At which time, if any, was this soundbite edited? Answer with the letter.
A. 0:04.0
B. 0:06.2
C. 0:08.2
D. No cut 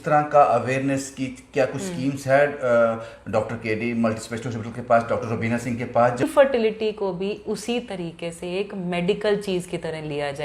B